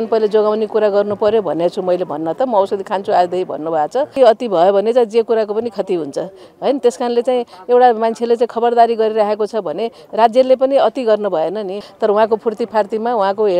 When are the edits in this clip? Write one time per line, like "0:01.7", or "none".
0:04.1
0:11.8